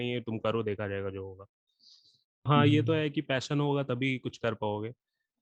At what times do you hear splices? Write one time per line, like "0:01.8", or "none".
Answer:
0:02.5

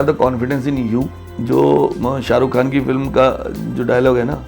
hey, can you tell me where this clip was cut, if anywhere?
none

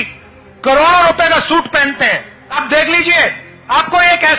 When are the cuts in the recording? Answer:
0:02.5
0:03.5

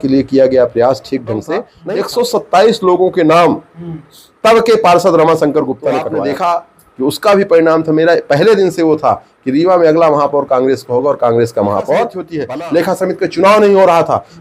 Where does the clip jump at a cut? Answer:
0:01.7
0:06.1
0:12.3

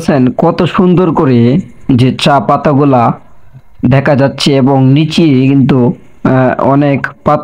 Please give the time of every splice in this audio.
none

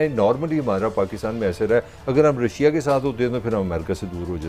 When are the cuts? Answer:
none

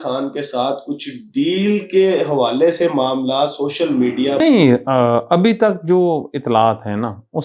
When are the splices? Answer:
0:04.4

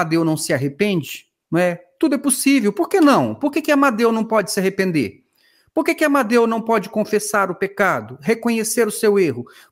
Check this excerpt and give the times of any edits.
none

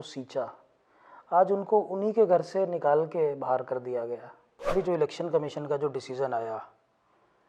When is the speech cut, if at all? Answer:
0:04.7

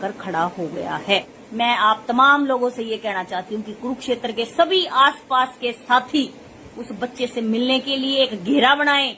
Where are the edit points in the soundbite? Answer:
0:01.4

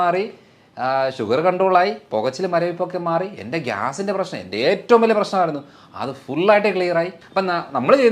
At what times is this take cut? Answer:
0:07.2

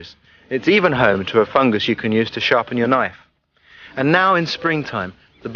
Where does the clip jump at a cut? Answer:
0:01.0

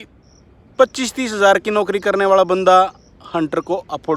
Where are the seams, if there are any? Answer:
none

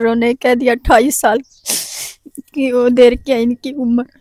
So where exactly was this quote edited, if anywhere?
none

